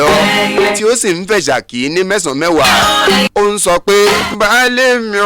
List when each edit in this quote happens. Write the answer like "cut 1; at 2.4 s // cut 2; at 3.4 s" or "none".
cut 1; at 4.3 s